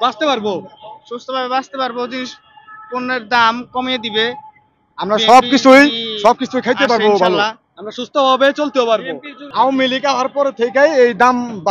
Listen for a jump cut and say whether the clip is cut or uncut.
uncut